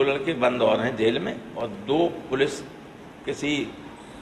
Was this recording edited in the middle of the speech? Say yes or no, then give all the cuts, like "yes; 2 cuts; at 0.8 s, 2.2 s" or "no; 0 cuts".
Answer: no; 0 cuts